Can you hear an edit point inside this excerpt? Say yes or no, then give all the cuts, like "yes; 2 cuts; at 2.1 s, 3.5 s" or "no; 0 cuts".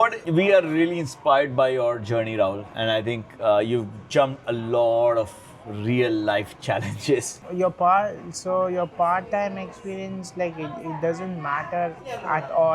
yes; 1 cut; at 7.4 s